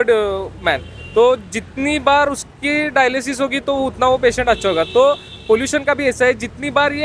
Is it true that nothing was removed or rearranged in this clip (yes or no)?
yes